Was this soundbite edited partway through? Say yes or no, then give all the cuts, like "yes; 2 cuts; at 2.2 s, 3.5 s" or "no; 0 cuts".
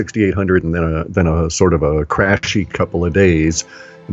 no; 0 cuts